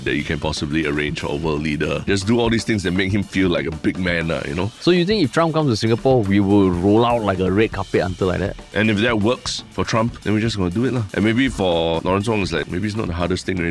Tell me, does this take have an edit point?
yes; 5 cuts; at 2.0 s, 8.6 s, 9.8 s, 11.1 s, 12.5 s

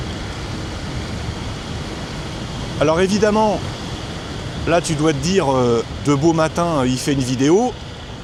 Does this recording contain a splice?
no; 0 cuts

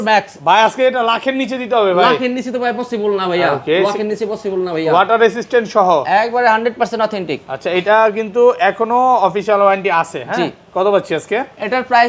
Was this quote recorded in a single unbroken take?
yes; 0 cuts

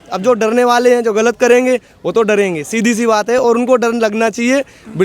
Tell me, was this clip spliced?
no; 0 cuts

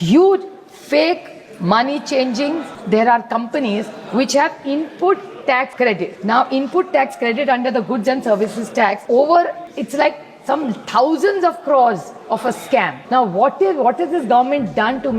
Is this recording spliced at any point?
yes; 5 cuts; at 2.7 s, 5.9 s, 9.0 s, 9.7 s, 13.0 s

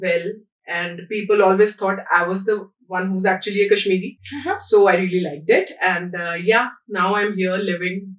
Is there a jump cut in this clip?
no; 0 cuts

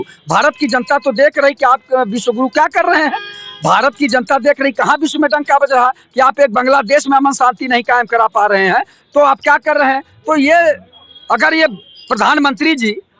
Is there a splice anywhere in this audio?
no; 0 cuts

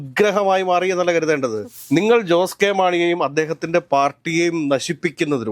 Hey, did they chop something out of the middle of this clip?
yes; 1 cut; at 1.7 s

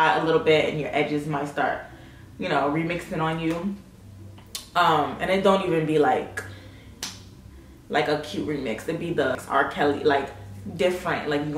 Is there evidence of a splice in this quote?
no; 0 cuts

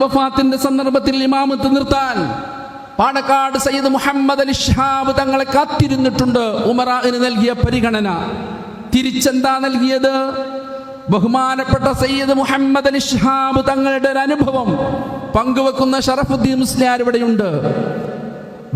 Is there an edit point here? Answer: no; 0 cuts

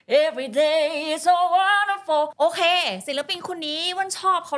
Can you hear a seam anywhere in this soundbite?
yes; 1 cut; at 2.3 s

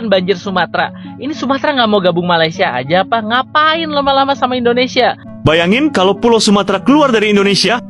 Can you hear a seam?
yes; 1 cut; at 5.2 s

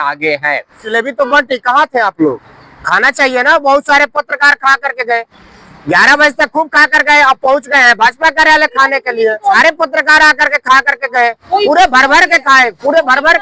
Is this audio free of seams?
no; 2 cuts; at 0.8 s, 9.6 s

